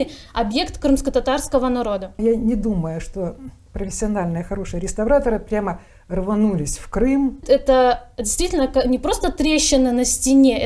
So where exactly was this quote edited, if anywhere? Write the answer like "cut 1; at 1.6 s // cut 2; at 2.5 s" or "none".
cut 1; at 2.2 s // cut 2; at 7.4 s